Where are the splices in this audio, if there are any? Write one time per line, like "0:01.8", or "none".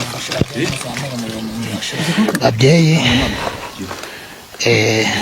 0:01.9